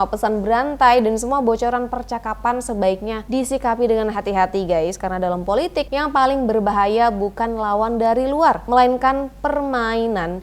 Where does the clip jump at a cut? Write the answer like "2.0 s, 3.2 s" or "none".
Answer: 3.2 s, 5.9 s, 8.6 s